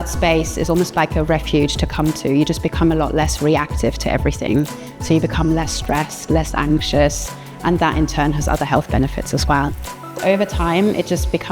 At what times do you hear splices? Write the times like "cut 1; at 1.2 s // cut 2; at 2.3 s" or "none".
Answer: cut 1; at 10.2 s